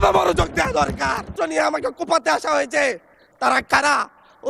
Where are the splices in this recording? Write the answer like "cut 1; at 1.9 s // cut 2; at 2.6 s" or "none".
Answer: cut 1; at 1.3 s

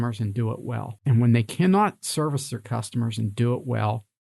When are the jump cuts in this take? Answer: cut 1; at 1.0 s

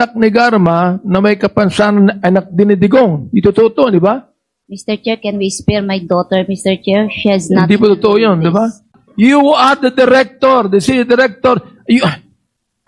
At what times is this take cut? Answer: cut 1; at 9.0 s

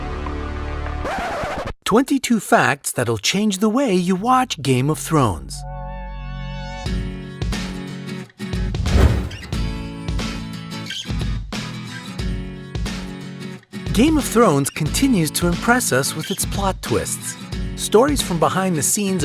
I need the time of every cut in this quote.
cut 1; at 10.9 s

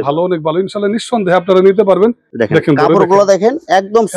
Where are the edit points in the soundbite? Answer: cut 1; at 2.3 s

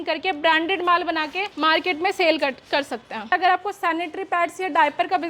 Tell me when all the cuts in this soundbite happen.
cut 1; at 1.4 s // cut 2; at 3.3 s

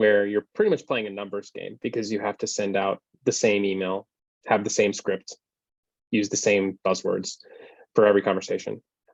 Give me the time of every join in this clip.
none

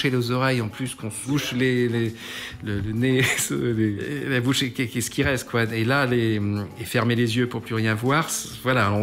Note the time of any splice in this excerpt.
cut 1; at 1.2 s // cut 2; at 4.0 s // cut 3; at 6.8 s

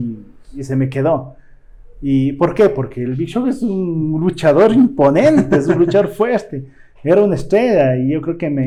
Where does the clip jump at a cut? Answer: none

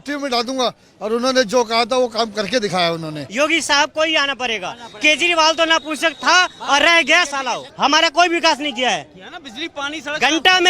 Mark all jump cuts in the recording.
cut 1; at 3.2 s // cut 2; at 7.7 s

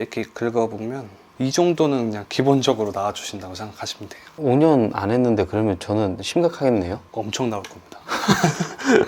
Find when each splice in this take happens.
cut 1; at 1.3 s // cut 2; at 4.3 s

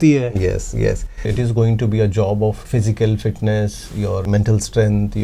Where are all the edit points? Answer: cut 1; at 1.2 s // cut 2; at 2.6 s // cut 3; at 4.2 s

